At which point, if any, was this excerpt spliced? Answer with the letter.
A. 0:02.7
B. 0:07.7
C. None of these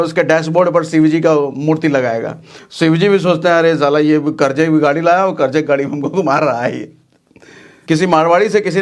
B